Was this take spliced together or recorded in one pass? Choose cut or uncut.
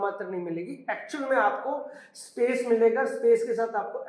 uncut